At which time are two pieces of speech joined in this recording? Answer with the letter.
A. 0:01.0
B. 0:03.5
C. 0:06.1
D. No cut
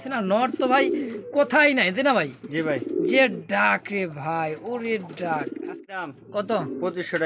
C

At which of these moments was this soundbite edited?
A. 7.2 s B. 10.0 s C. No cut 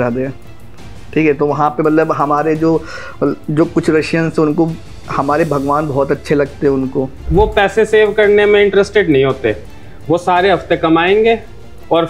A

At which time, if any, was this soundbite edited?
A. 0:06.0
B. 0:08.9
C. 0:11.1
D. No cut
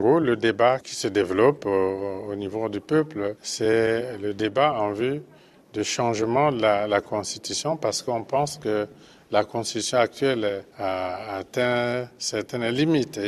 C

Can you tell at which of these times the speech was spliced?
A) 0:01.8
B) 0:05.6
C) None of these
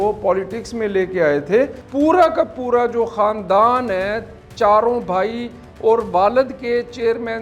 A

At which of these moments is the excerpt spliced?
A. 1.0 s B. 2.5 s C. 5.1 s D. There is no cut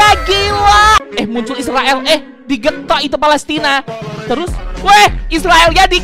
A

